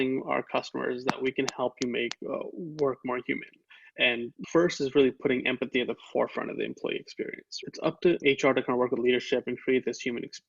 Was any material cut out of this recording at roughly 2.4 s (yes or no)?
no